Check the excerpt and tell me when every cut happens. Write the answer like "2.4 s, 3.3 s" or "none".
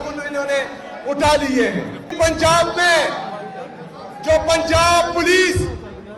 2.1 s